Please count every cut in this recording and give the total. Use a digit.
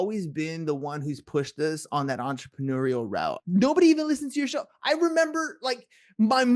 1